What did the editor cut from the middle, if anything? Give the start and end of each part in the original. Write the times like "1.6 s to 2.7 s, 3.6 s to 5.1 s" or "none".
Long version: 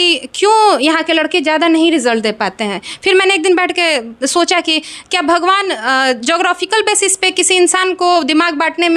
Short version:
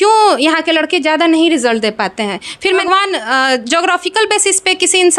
3.2 s to 5.4 s